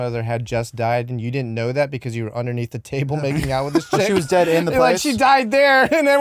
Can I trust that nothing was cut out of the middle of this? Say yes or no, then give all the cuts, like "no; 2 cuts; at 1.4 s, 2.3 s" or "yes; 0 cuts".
yes; 0 cuts